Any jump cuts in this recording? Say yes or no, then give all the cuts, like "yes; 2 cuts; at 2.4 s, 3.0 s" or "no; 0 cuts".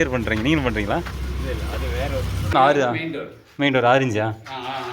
yes; 1 cut; at 2.5 s